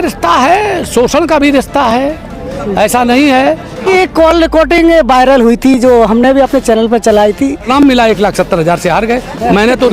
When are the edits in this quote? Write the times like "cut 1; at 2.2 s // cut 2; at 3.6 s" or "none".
cut 1; at 3.9 s // cut 2; at 7.7 s